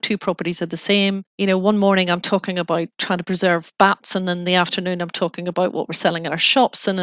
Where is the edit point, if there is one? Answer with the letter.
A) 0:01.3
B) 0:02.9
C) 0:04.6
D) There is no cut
A